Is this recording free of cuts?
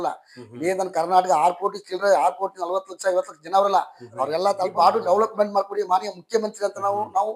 no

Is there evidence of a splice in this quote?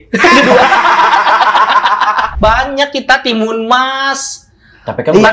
yes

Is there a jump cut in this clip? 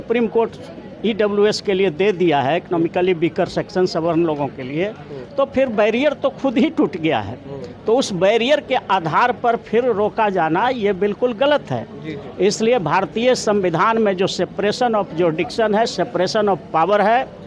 no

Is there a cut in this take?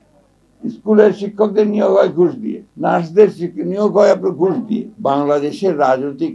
yes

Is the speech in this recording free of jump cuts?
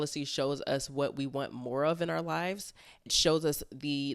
no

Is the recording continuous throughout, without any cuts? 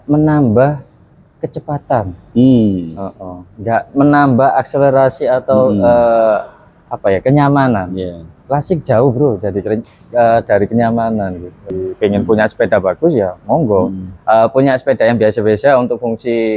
no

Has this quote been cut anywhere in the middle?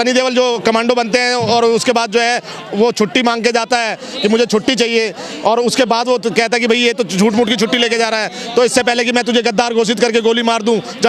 no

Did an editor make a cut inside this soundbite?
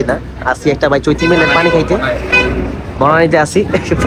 no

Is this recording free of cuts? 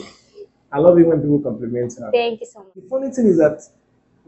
no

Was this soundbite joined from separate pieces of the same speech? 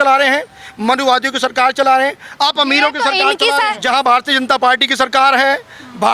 yes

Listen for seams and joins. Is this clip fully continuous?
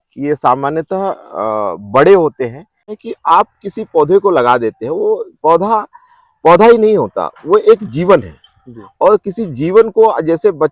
no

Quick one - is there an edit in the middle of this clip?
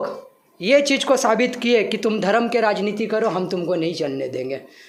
no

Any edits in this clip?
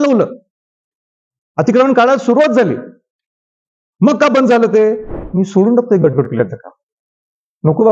yes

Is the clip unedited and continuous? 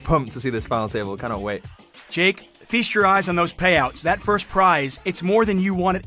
no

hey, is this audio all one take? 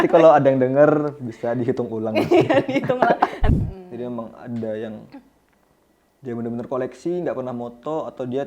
no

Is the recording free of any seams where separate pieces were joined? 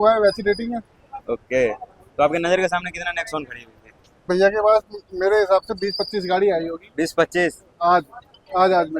no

